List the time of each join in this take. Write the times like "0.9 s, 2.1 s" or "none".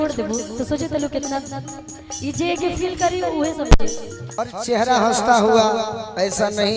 4.3 s